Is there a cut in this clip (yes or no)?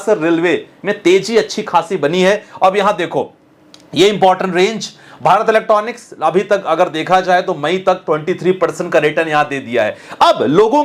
no